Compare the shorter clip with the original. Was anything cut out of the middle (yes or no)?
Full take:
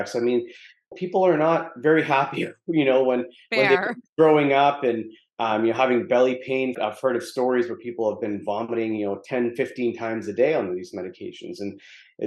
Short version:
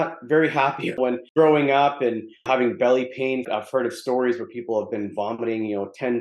yes